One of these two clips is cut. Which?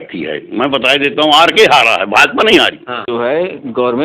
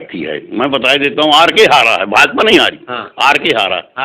first; 1 cut; at 2.9 s

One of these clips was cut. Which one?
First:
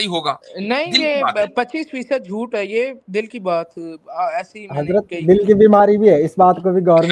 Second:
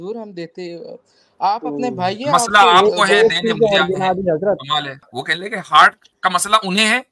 second; 1 cut; at 5.1 s

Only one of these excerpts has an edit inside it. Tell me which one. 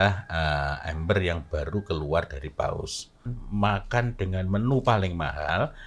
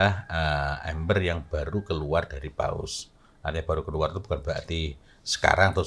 first; 1 cut; at 3.3 s

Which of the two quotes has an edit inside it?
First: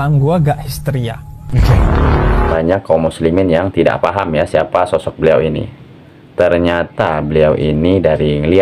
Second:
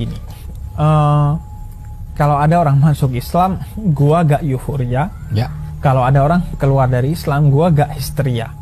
first; 1 cut; at 2.5 s

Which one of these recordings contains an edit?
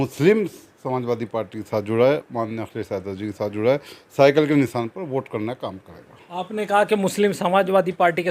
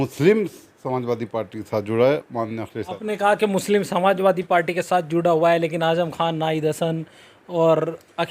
second; 1 cut; at 2.8 s

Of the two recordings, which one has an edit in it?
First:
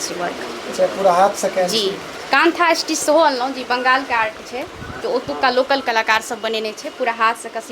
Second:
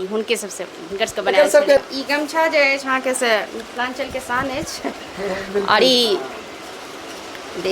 second; 1 cut; at 1.8 s

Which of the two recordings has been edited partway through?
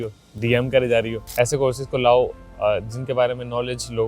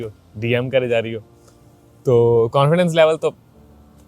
first; 1 cut; at 1.3 s

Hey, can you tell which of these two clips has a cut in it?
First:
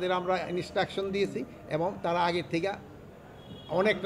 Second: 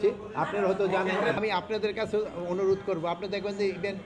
second; 1 cut; at 1.4 s

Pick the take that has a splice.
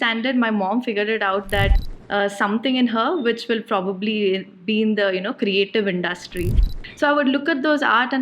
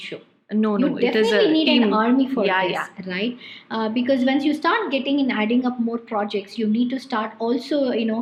first; 2 cuts; at 1.8 s, 6.6 s

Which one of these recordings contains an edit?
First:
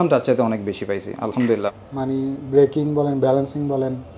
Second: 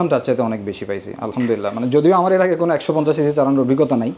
first; 1 cut; at 1.7 s

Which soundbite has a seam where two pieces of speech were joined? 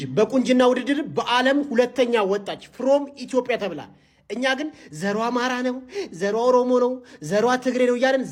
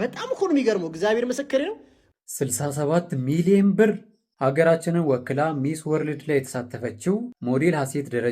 second; 1 cut; at 1.9 s

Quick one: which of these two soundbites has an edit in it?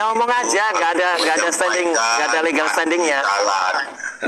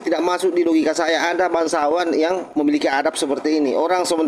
second; 1 cut; at 2.5 s

